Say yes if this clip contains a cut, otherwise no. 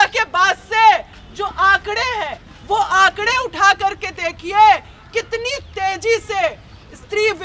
no